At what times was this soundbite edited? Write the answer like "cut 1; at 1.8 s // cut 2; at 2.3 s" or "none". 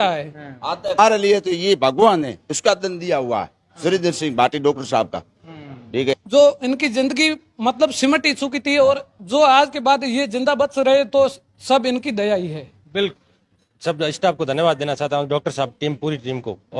cut 1; at 0.9 s // cut 2; at 6.1 s // cut 3; at 13.1 s